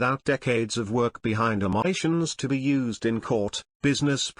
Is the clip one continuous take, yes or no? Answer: no